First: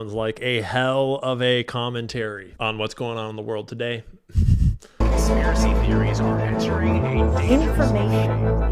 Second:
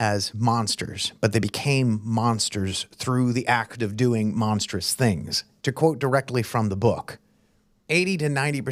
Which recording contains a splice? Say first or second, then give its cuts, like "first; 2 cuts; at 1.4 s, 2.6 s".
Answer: first; 2 cuts; at 2.4 s, 4.8 s